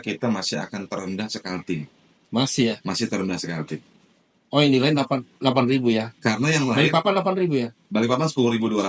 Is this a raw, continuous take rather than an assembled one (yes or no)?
yes